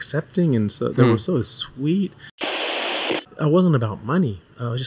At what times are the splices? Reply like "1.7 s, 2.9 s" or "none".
2.7 s